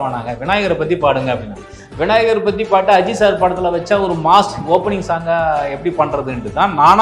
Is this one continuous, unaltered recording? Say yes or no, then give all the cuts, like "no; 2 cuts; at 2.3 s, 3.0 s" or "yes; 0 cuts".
yes; 0 cuts